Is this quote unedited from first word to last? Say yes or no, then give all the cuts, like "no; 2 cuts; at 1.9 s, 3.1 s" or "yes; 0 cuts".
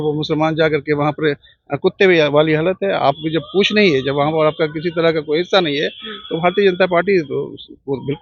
yes; 0 cuts